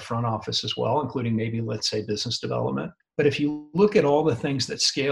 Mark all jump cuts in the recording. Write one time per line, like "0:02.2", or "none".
0:03.0